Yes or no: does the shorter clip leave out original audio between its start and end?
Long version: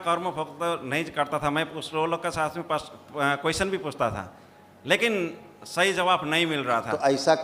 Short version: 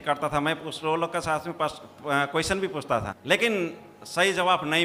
yes